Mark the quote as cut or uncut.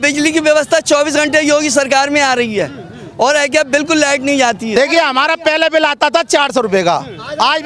uncut